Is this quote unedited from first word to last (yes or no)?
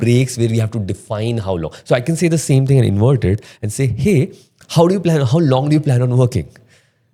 yes